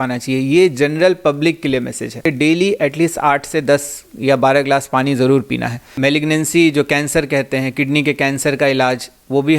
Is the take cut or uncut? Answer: cut